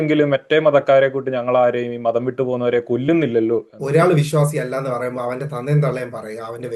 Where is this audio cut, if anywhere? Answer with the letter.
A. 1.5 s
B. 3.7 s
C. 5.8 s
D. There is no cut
B